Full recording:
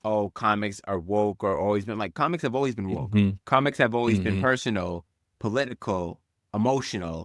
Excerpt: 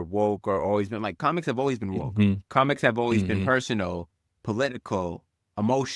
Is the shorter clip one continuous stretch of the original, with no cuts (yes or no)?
yes